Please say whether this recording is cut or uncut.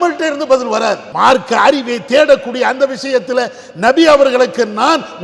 cut